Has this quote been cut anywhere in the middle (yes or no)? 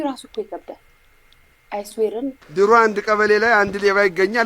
yes